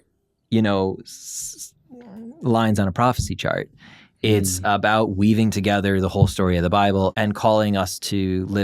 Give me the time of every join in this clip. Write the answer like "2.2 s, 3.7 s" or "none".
7.1 s